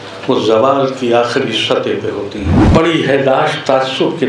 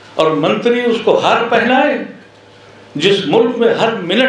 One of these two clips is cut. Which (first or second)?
first